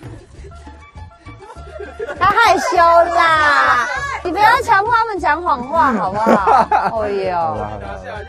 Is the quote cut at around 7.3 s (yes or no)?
no